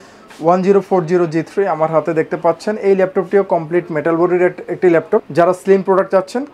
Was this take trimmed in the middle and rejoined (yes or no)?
no